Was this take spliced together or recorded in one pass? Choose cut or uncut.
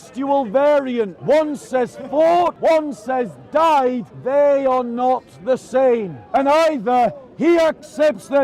cut